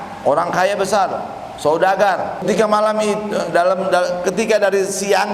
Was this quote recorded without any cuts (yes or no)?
no